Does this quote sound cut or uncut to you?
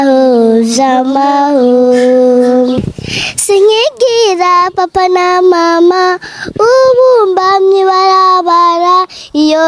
cut